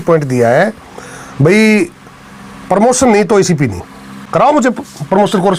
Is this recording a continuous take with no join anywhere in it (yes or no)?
no